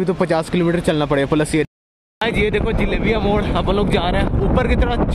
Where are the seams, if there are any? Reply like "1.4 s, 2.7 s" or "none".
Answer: 1.7 s